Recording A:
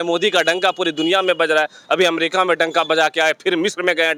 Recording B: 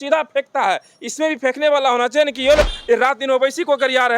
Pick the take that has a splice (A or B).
B